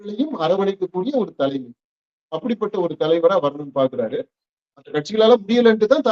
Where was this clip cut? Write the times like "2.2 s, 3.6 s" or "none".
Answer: 4.6 s